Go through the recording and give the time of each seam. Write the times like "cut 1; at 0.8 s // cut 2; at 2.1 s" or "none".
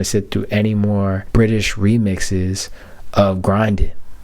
cut 1; at 1.2 s